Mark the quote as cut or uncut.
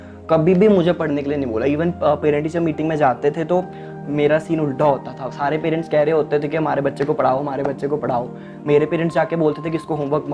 uncut